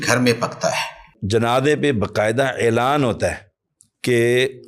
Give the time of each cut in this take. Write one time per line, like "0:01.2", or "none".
0:01.1